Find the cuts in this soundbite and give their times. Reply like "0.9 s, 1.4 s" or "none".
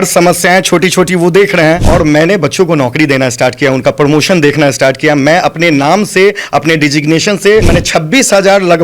1.9 s, 7.8 s